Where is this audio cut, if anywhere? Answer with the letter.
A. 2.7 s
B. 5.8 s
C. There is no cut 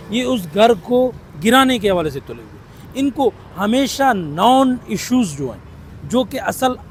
C